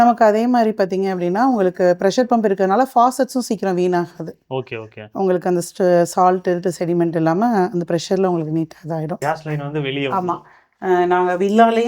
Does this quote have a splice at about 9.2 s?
yes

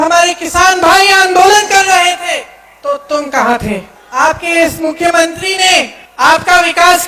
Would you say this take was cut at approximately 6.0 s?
yes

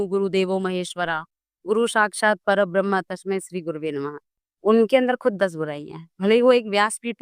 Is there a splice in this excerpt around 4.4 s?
yes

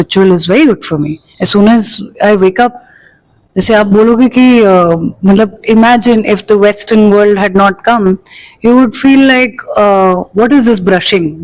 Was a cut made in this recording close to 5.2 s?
no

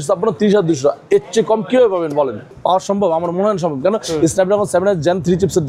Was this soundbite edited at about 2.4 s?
yes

